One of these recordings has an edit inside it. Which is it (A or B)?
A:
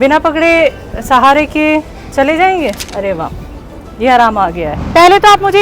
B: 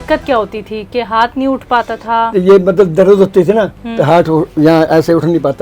A